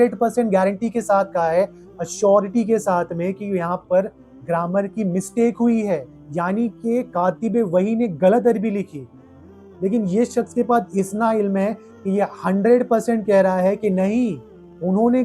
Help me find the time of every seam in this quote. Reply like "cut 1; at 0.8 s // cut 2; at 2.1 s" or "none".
cut 1; at 6.1 s // cut 2; at 9.6 s